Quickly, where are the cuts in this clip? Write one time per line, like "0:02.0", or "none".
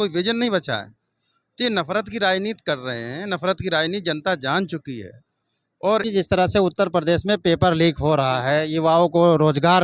0:06.1